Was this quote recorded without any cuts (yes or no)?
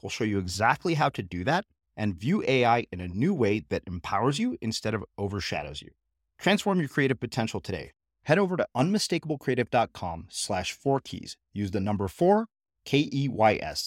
yes